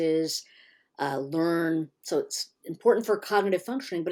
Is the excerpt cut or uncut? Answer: uncut